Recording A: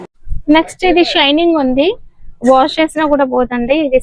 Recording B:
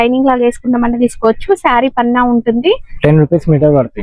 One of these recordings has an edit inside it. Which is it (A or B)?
B